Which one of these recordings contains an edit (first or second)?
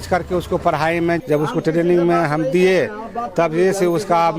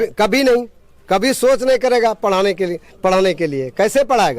first